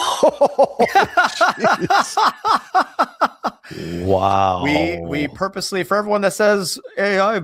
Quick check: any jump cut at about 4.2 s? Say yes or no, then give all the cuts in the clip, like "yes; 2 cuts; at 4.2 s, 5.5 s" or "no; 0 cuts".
no; 0 cuts